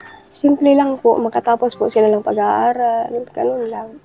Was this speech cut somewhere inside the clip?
no; 0 cuts

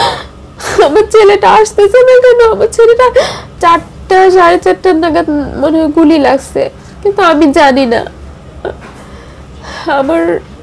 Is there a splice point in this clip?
no; 0 cuts

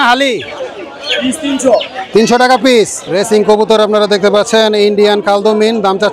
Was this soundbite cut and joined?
yes; 1 cut; at 3.1 s

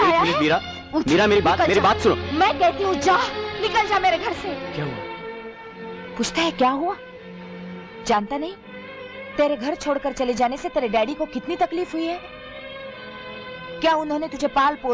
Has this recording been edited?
yes; 1 cut; at 4.7 s

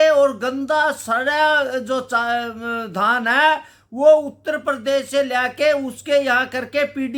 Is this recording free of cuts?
yes; 0 cuts

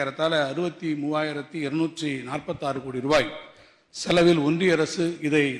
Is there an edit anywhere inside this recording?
no; 0 cuts

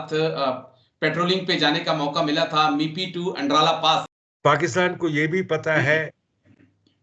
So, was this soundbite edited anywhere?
yes; 1 cut; at 4.2 s

